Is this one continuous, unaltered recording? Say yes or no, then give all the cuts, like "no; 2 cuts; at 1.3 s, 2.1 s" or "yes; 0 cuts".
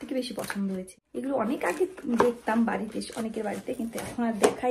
no; 1 cut; at 1.0 s